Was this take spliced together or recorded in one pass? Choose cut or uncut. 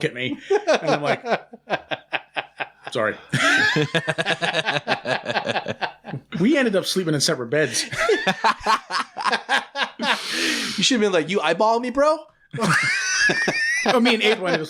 uncut